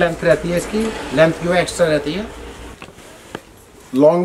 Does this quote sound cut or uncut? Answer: cut